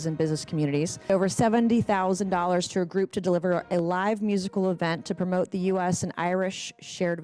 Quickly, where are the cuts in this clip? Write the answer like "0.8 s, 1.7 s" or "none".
1.1 s